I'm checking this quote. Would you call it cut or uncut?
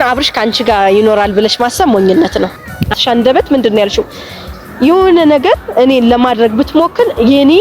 cut